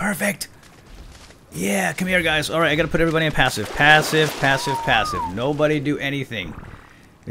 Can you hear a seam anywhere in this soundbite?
no; 0 cuts

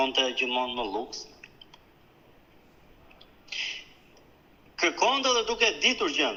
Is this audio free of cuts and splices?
yes; 0 cuts

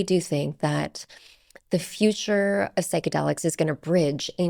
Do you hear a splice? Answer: no; 0 cuts

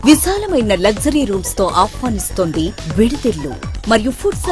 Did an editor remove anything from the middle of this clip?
no; 0 cuts

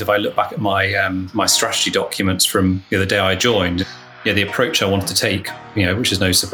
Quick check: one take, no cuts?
no; 2 cuts; at 1.3 s, 3.9 s

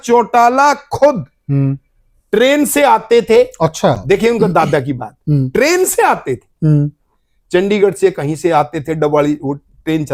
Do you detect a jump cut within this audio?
no; 0 cuts

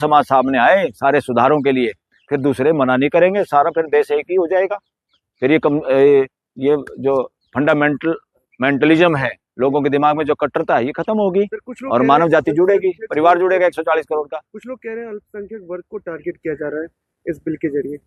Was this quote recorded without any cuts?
yes; 0 cuts

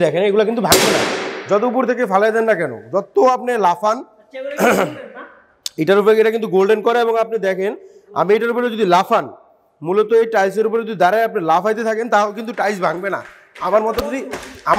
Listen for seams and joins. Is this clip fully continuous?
yes; 0 cuts

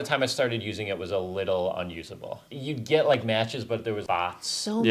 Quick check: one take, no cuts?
no; 2 cuts; at 2.4 s, 4.0 s

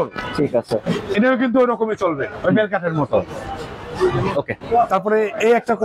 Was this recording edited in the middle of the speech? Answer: no; 0 cuts

